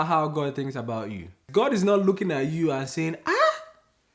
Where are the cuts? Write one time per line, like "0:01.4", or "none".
0:01.4